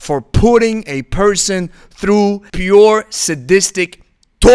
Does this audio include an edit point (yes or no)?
no